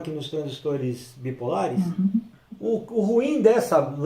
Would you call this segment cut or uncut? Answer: cut